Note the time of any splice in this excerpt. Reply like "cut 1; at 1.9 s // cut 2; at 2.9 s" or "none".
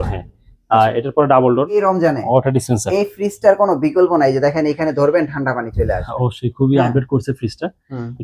cut 1; at 1.8 s